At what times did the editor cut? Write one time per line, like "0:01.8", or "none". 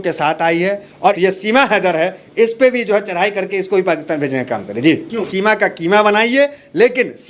0:01.2
0:05.3

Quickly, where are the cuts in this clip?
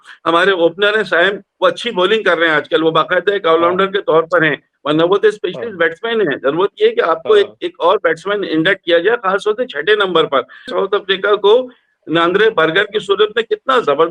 0:10.7

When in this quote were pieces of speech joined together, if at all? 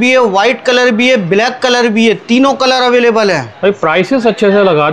none

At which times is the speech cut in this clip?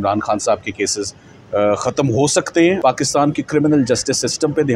0:02.8

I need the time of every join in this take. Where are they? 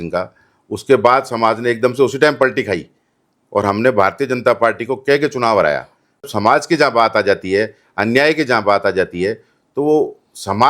0:06.3

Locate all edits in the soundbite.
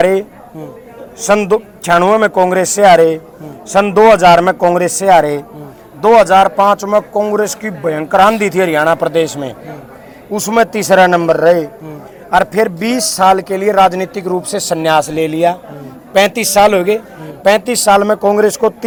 none

